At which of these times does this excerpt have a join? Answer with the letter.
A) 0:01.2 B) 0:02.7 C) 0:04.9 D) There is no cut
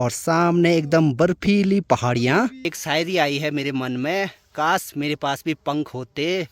B